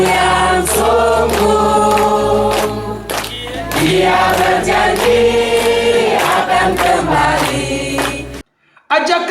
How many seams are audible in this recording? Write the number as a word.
one